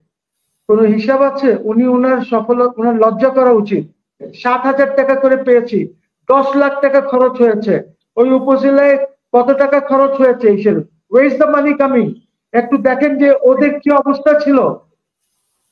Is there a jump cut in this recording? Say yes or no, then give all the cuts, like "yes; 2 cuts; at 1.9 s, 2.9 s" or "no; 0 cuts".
yes; 1 cut; at 4.3 s